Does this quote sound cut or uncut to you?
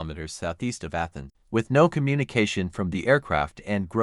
cut